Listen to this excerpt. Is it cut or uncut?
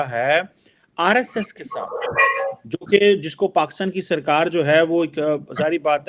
uncut